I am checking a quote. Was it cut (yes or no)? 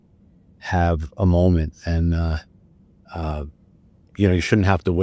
no